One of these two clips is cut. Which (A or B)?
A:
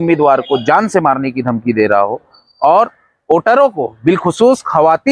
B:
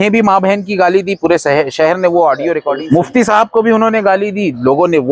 B